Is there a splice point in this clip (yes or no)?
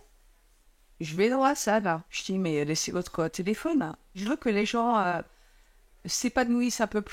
yes